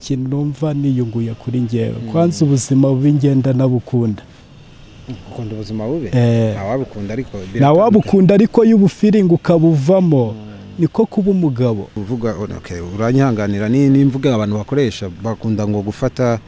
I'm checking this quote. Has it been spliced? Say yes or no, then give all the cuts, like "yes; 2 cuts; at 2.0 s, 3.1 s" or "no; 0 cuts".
yes; 1 cut; at 12.0 s